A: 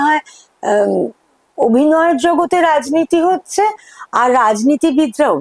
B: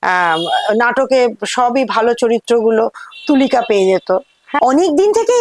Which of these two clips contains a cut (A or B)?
B